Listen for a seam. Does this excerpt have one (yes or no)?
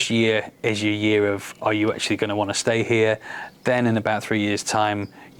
no